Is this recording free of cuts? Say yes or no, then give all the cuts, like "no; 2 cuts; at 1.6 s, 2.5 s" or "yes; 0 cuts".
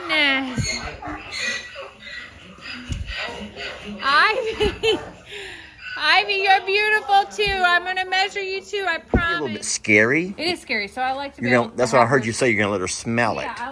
no; 1 cut; at 9.7 s